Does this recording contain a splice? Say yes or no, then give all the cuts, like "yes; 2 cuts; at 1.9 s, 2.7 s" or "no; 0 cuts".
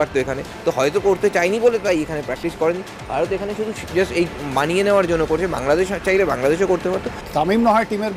yes; 1 cut; at 7.1 s